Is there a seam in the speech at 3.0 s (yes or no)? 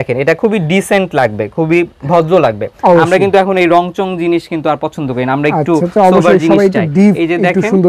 no